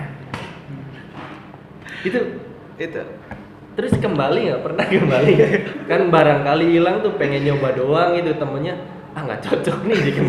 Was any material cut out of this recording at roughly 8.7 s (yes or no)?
no